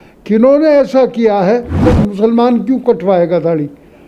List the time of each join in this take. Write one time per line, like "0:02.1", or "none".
0:01.8

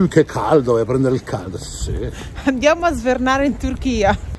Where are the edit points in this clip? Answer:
none

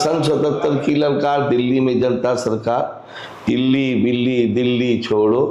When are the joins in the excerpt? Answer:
none

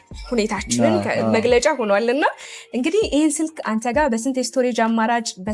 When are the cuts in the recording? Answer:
none

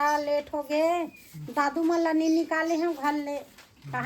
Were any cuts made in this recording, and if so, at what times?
none

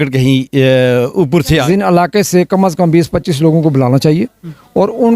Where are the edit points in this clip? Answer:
0:01.6

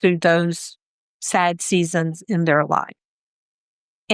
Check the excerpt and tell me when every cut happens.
none

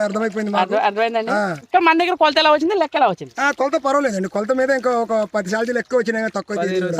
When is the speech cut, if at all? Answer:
0:01.6

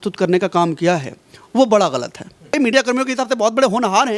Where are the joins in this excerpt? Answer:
0:02.6

